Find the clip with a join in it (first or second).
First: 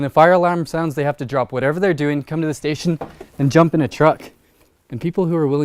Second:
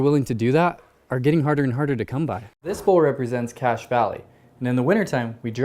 second